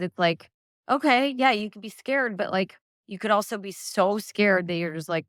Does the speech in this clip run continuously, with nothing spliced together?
yes; 0 cuts

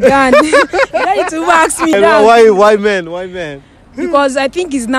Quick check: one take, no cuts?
no; 1 cut; at 1.9 s

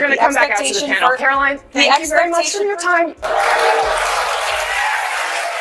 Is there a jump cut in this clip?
yes; 1 cut; at 3.2 s

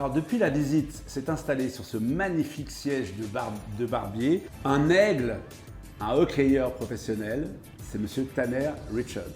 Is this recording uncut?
no; 1 cut; at 4.5 s

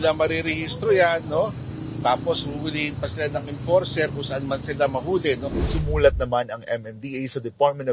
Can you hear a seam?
yes; 1 cut; at 5.6 s

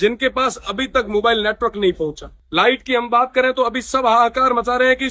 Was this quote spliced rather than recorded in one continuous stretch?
no; 0 cuts

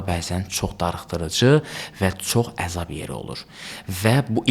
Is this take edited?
no; 0 cuts

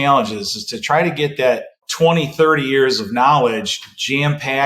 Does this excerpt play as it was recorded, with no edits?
no; 1 cut; at 1.8 s

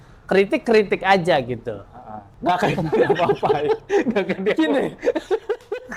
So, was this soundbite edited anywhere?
no; 0 cuts

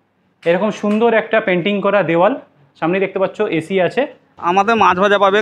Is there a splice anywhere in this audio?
yes; 1 cut; at 4.3 s

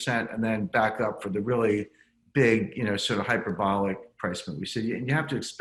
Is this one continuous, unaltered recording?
yes; 0 cuts

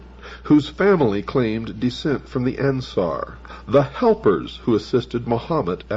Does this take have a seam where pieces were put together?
yes; 1 cut; at 4.9 s

